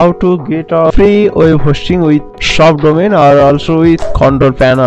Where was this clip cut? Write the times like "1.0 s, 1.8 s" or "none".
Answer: 0.9 s, 2.4 s, 4.0 s